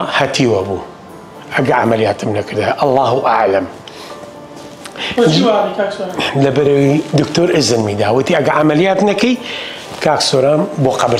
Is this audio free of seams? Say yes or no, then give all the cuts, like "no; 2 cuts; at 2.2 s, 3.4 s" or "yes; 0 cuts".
yes; 0 cuts